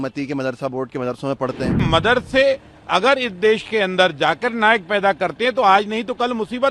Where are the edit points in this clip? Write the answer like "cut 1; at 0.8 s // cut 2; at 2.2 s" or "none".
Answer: cut 1; at 1.8 s